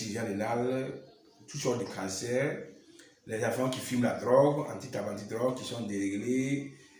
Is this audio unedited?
yes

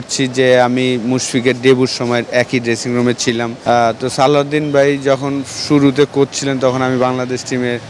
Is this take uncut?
no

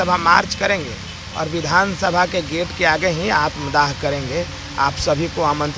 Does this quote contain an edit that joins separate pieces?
no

